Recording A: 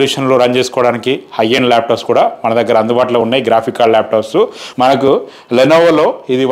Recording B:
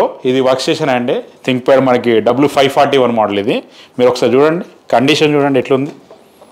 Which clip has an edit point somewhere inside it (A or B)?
A